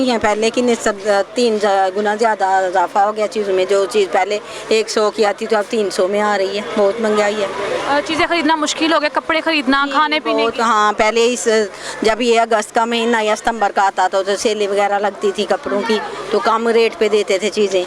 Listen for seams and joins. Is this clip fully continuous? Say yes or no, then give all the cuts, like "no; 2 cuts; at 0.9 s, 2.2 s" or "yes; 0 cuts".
yes; 0 cuts